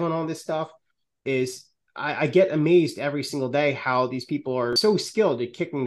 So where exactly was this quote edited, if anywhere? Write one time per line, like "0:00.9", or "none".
0:04.8